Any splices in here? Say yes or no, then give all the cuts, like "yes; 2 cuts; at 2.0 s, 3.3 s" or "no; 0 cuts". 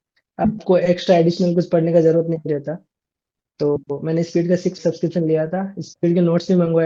yes; 1 cut; at 4.8 s